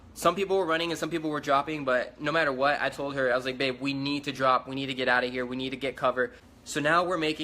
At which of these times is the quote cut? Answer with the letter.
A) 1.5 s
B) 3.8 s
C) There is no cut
B